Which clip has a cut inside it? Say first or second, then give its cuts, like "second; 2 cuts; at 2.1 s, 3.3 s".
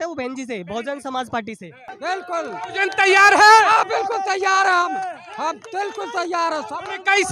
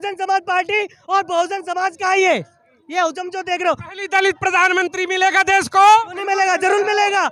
first; 1 cut; at 1.9 s